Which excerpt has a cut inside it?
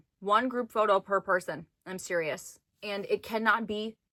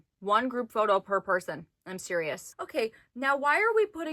second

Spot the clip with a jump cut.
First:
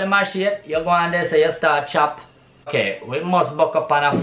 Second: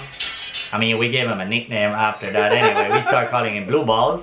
first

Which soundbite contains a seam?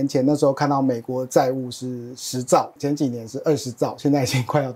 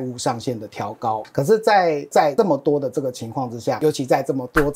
second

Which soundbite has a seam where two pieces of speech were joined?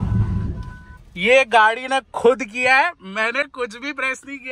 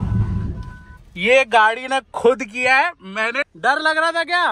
second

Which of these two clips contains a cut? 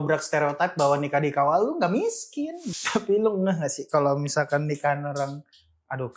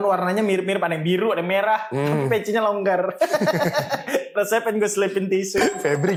first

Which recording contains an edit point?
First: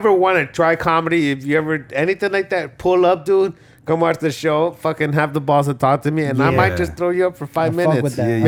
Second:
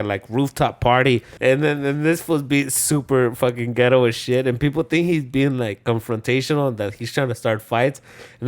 second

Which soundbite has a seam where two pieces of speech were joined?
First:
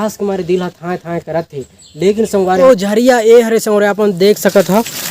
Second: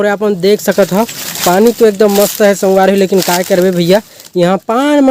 first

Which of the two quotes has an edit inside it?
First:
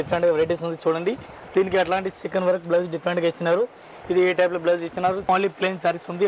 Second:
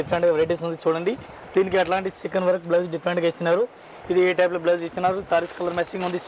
first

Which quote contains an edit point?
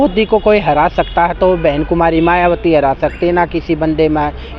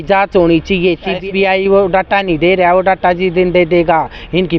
second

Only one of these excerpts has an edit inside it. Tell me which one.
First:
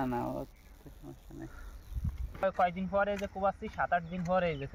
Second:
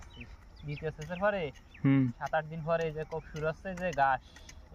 first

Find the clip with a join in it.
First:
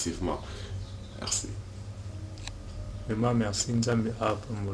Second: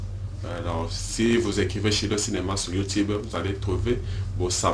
first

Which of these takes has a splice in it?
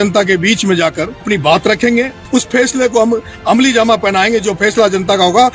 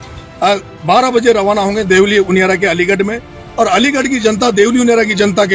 first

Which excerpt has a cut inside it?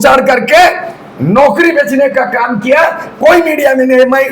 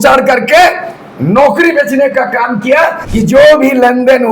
second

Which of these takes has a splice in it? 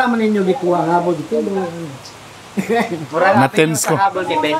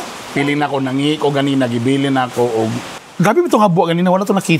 second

